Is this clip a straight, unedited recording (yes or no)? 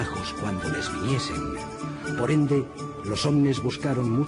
no